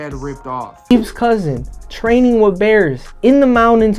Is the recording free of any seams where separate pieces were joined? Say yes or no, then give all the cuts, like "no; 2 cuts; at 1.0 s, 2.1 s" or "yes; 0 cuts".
no; 1 cut; at 0.9 s